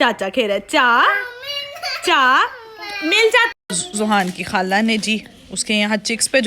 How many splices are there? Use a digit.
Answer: 1